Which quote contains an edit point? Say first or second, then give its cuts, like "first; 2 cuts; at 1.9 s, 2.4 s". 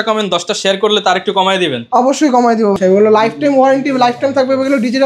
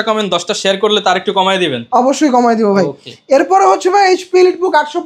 first; 1 cut; at 2.8 s